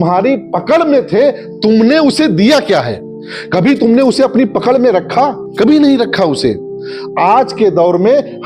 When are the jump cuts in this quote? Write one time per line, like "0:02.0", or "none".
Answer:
none